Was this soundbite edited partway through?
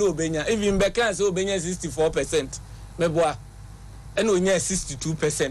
no; 0 cuts

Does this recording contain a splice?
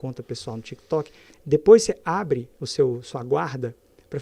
yes; 2 cuts; at 1.3 s, 2.6 s

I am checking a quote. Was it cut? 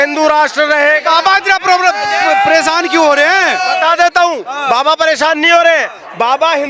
no; 0 cuts

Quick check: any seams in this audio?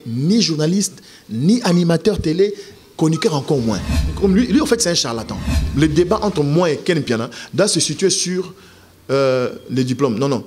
yes; 2 cuts; at 4.0 s, 5.6 s

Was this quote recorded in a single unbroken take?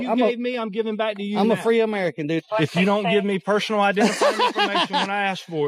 no; 1 cut; at 2.4 s

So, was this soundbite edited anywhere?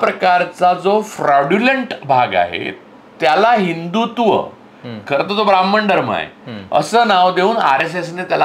no; 0 cuts

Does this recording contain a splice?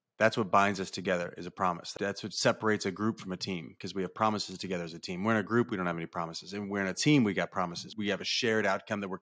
yes; 2 cuts; at 1.9 s, 7.9 s

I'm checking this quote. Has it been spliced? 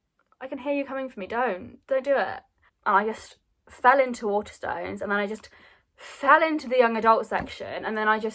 yes; 1 cut; at 2.6 s

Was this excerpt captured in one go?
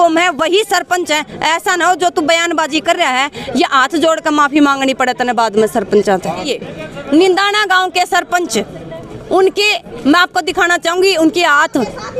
no; 1 cut; at 6.5 s

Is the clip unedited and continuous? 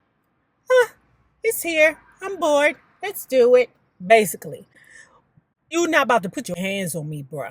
no; 1 cut; at 6.6 s

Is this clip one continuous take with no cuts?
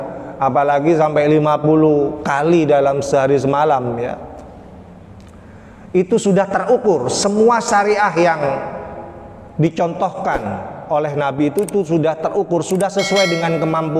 yes; 0 cuts

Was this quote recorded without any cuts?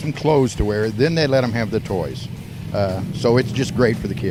yes; 0 cuts

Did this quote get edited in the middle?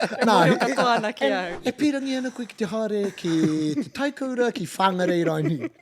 yes; 1 cut; at 1.5 s

